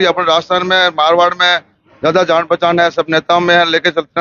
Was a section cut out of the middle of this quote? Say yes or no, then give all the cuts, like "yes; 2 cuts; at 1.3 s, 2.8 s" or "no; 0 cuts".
no; 0 cuts